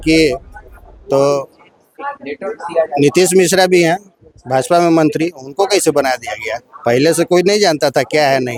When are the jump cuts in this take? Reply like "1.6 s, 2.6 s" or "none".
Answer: none